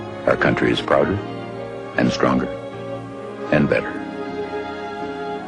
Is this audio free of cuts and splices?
no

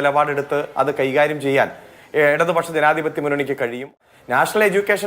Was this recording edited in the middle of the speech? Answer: yes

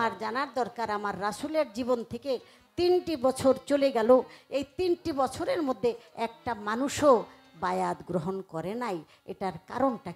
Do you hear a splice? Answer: no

